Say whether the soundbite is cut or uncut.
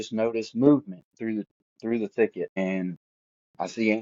cut